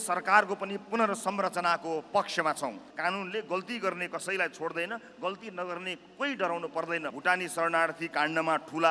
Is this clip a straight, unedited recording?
no; 2 cuts; at 2.8 s, 7.1 s

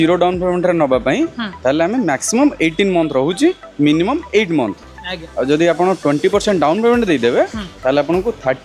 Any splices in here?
no; 0 cuts

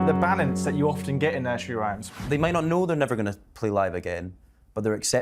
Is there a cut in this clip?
yes; 1 cut; at 2.0 s

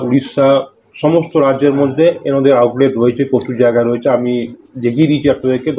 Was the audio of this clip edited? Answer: no; 0 cuts

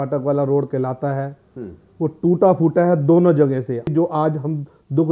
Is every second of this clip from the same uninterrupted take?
no; 1 cut; at 3.9 s

